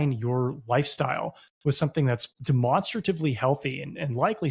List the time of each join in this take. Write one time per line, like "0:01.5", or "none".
0:02.3